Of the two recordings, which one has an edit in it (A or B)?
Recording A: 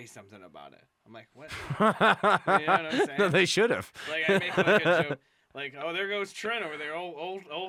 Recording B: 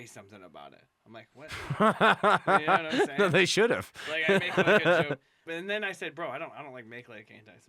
B